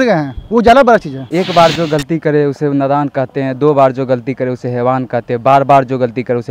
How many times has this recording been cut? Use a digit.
1